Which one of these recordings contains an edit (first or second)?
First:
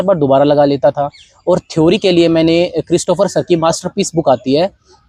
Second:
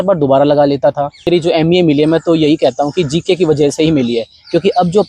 second